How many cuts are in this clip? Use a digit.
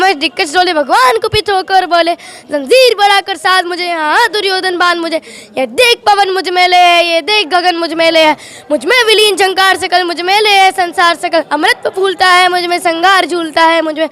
0